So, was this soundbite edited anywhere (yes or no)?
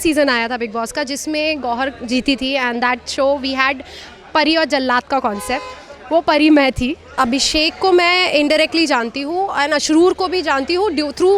yes